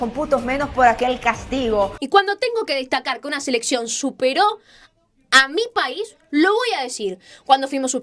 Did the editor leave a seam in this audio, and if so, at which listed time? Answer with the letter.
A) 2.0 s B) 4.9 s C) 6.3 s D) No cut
A